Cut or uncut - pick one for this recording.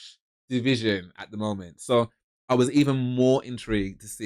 uncut